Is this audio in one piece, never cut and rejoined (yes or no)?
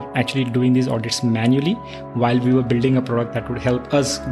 yes